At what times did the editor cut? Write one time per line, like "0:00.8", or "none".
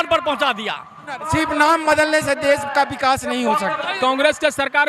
0:01.2
0:03.9